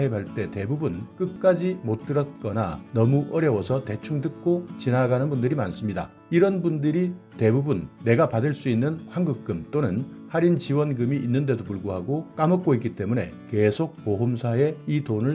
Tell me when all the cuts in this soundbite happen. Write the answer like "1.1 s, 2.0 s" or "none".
1.0 s